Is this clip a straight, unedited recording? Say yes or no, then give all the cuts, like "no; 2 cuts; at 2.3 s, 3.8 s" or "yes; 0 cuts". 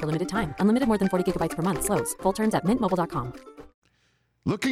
no; 1 cut; at 3.7 s